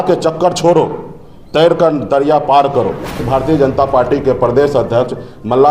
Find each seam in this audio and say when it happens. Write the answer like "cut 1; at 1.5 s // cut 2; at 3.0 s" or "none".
cut 1; at 3.2 s

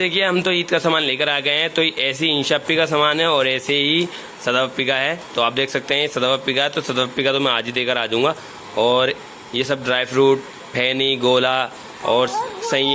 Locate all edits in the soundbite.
none

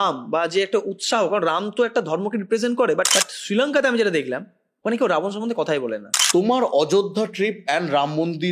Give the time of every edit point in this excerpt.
cut 1; at 3.1 s // cut 2; at 6.1 s

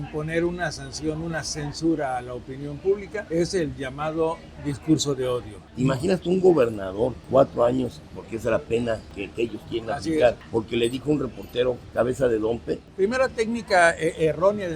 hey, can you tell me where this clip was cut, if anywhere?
cut 1; at 3.2 s // cut 2; at 5.6 s // cut 3; at 7.2 s // cut 4; at 9.2 s // cut 5; at 10.4 s // cut 6; at 11.8 s // cut 7; at 12.9 s

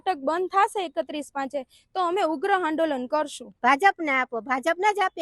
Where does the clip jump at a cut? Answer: cut 1; at 3.4 s

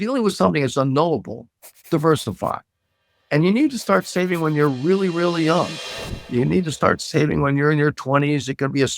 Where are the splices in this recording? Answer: cut 1; at 6.3 s

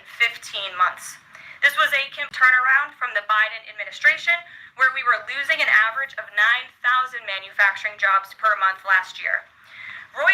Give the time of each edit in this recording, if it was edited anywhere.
cut 1; at 2.2 s

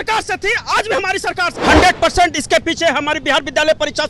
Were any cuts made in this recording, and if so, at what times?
cut 1; at 1.5 s

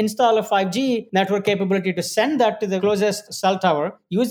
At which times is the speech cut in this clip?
cut 1; at 1.1 s // cut 2; at 2.8 s

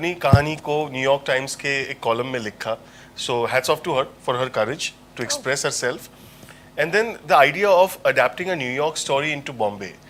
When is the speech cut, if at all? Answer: none

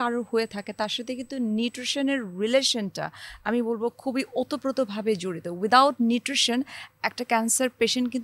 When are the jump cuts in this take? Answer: none

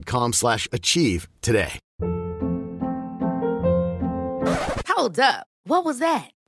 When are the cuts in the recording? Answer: cut 1; at 1.8 s

